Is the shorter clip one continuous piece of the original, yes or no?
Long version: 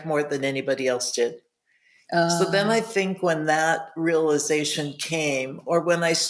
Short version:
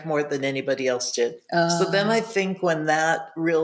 no